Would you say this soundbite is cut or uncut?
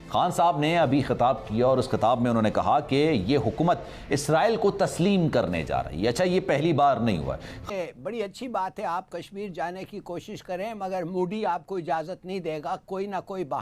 cut